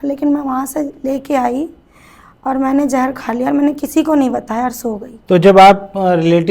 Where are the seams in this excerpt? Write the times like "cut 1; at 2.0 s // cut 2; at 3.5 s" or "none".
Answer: cut 1; at 5.1 s